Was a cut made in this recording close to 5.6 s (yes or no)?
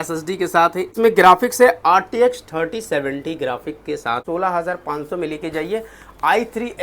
no